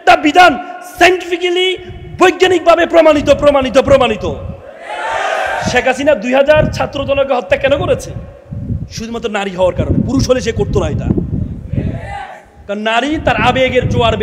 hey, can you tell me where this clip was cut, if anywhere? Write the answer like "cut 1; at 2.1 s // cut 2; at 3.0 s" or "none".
none